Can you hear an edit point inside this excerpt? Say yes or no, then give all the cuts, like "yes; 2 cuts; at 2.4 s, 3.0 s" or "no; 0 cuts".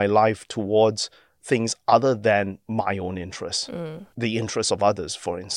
no; 0 cuts